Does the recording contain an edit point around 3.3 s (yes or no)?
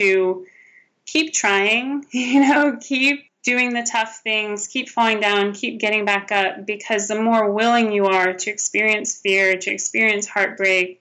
yes